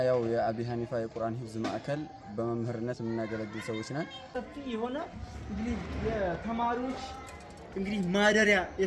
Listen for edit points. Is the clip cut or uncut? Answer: cut